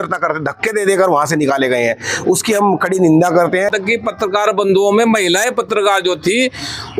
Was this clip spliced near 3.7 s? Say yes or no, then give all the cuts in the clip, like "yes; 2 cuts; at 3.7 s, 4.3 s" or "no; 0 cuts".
yes; 1 cut; at 3.7 s